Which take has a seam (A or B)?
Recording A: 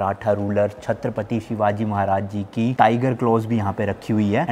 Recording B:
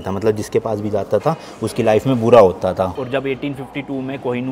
B